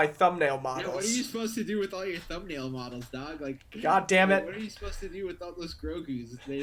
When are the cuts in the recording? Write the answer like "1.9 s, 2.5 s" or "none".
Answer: none